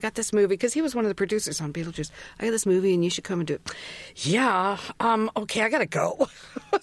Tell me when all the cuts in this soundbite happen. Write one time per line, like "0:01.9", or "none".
none